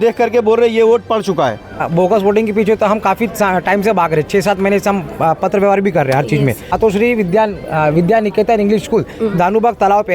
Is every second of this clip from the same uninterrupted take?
no; 2 cuts; at 1.8 s, 6.7 s

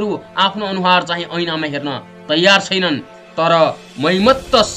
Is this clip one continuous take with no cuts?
no; 1 cut; at 3.2 s

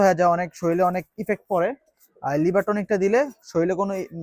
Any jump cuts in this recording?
no; 0 cuts

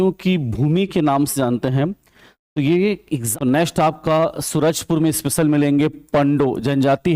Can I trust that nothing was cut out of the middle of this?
no; 1 cut; at 3.3 s

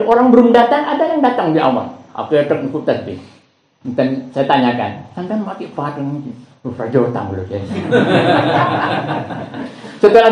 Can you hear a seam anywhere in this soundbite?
no; 0 cuts

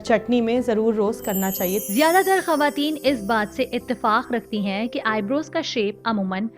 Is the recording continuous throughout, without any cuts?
no; 1 cut; at 1.8 s

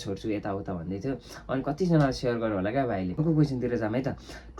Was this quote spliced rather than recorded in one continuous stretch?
yes; 1 cut; at 3.2 s

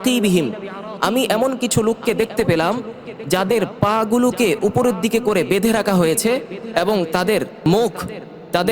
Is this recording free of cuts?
no; 1 cut; at 7.6 s

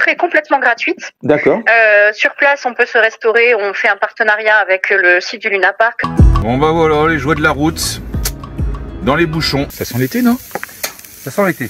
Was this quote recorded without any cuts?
no; 2 cuts; at 6.0 s, 9.7 s

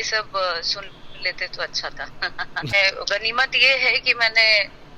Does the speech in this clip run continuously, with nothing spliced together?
no; 1 cut; at 2.7 s

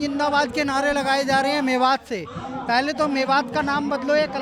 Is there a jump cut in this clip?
no; 0 cuts

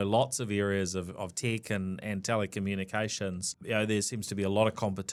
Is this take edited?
no; 0 cuts

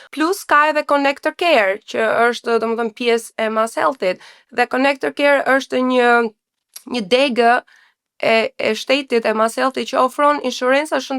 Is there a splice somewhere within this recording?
no; 0 cuts

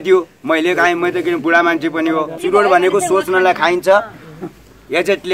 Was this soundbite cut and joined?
yes; 1 cut; at 2.3 s

